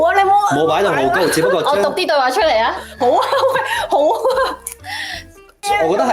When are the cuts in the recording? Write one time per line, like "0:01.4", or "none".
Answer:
none

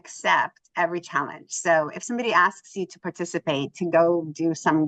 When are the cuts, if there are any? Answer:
none

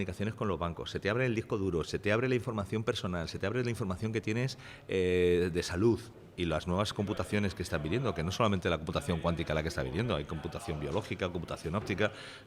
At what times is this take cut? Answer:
0:06.2

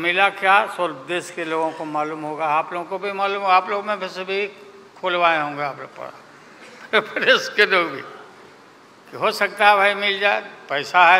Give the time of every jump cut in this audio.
none

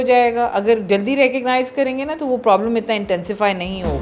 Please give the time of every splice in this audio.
none

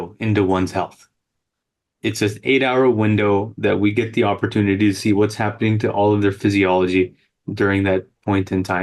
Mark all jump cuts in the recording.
none

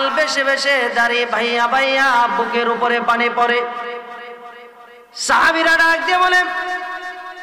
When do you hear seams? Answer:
none

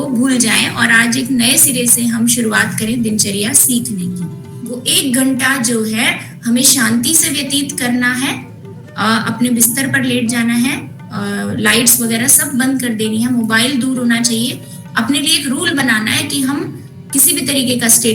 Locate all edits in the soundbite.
0:04.8

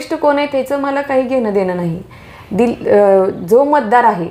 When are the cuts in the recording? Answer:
none

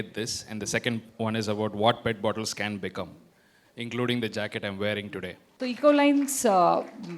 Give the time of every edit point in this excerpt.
0:05.4

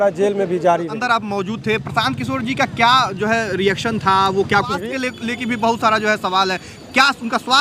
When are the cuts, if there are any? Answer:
0:01.0
0:04.8

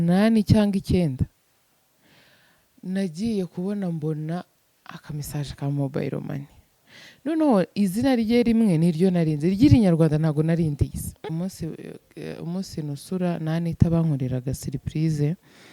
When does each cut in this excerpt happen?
0:11.3

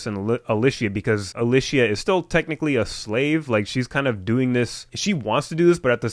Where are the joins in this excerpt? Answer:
0:01.3

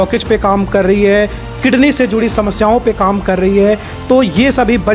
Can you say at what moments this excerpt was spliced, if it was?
none

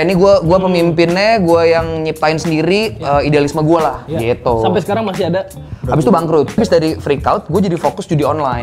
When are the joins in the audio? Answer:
0:06.6

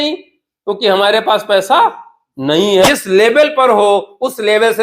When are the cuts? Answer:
0:02.9

